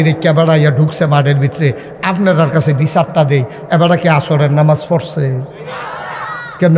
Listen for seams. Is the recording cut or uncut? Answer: uncut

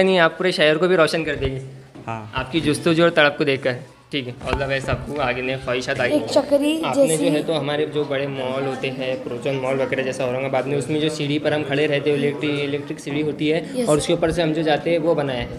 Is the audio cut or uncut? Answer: cut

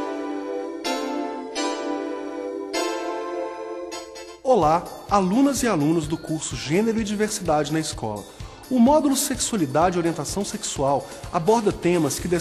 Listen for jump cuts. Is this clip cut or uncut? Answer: uncut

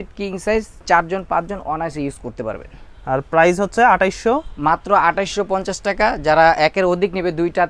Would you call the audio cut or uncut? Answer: uncut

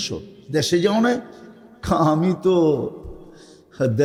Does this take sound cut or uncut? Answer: uncut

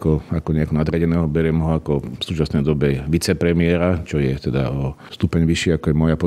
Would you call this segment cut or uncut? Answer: cut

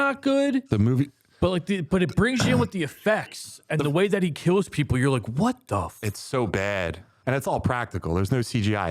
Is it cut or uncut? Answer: cut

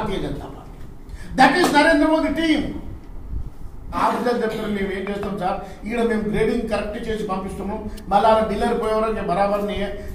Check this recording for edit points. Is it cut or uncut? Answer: cut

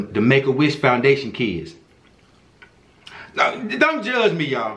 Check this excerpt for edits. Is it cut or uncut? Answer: uncut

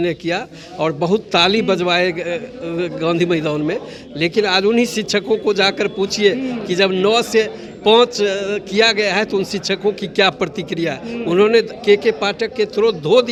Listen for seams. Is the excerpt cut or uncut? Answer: uncut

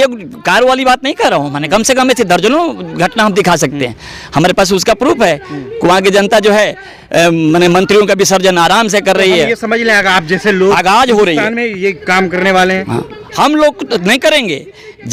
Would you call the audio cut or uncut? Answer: uncut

